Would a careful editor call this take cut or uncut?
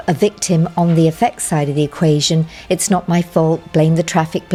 uncut